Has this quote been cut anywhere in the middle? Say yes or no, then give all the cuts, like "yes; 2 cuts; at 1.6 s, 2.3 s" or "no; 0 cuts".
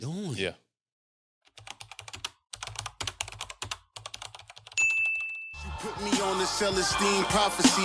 yes; 1 cut; at 1.0 s